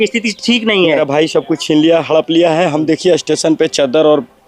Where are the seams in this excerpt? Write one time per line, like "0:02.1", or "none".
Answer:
0:01.0